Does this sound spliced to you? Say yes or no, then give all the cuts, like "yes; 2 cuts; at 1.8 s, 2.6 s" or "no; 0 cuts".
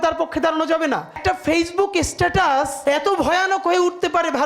yes; 2 cuts; at 1.2 s, 2.7 s